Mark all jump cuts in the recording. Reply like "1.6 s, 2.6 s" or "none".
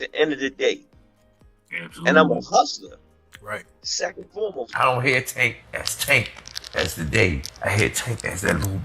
4.6 s